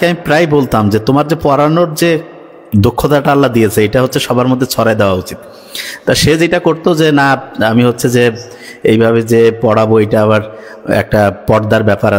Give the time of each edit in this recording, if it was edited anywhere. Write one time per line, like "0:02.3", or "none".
none